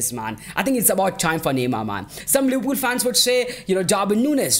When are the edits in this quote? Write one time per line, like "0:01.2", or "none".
0:02.1

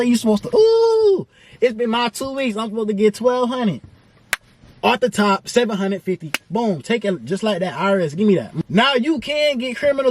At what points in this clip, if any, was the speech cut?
0:08.6

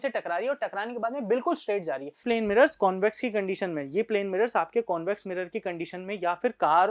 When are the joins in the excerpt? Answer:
0:02.2

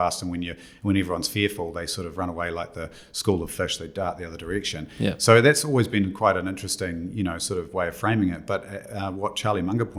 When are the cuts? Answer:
none

